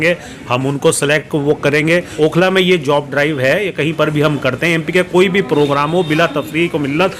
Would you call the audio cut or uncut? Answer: cut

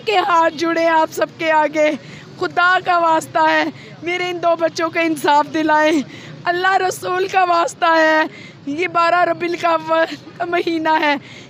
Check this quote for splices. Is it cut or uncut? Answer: uncut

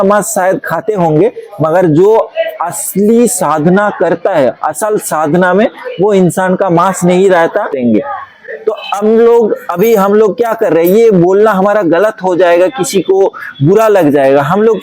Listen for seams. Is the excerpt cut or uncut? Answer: cut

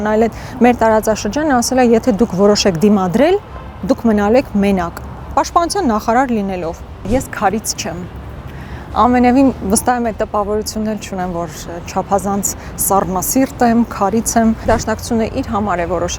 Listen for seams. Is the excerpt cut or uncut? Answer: cut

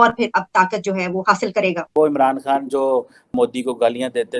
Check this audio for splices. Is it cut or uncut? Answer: cut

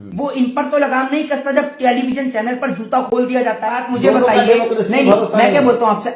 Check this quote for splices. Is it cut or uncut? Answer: cut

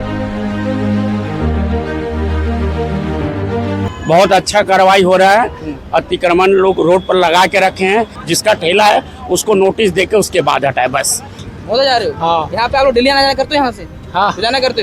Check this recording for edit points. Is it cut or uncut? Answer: cut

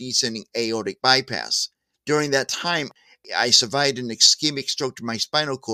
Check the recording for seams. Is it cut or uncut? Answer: cut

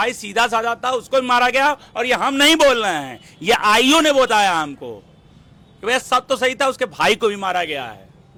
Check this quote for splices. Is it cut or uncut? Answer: uncut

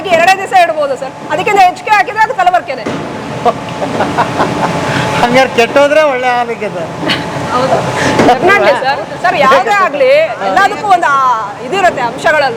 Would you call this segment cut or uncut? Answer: uncut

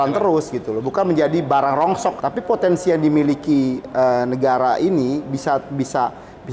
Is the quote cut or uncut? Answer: cut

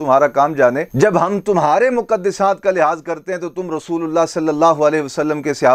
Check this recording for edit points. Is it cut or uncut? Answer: uncut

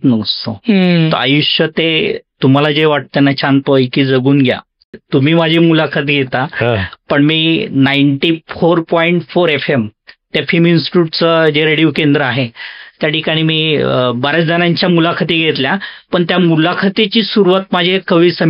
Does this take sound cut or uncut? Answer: cut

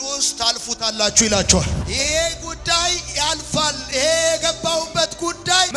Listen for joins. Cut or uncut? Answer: cut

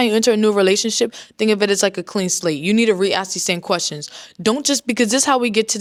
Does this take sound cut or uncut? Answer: uncut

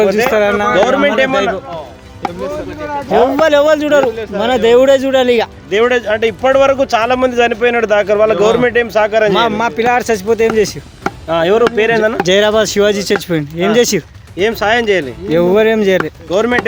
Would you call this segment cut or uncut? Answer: uncut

